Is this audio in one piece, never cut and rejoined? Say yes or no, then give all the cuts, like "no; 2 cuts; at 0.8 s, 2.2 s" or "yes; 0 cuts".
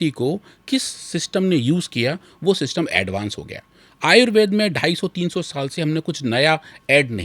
yes; 0 cuts